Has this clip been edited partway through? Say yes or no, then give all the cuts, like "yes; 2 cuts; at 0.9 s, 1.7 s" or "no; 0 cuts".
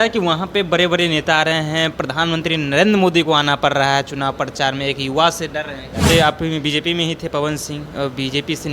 yes; 1 cut; at 6.1 s